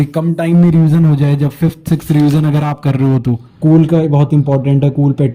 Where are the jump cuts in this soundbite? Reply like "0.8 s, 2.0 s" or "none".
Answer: 3.5 s